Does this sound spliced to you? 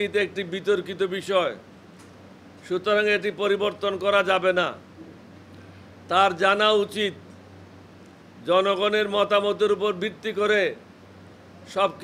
no; 0 cuts

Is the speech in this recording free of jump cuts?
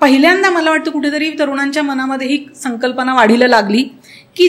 yes; 0 cuts

